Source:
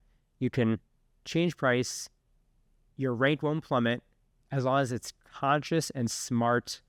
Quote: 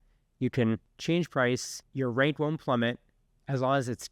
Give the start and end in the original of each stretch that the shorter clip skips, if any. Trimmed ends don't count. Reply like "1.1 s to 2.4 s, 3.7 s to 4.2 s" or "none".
0.9 s to 1.2 s, 2.0 s to 2.8 s